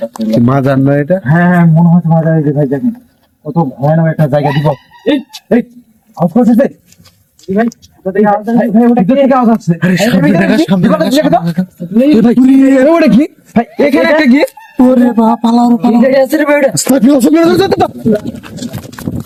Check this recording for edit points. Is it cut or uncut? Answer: uncut